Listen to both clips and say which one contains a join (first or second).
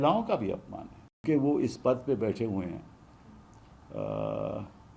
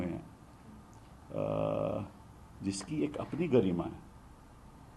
first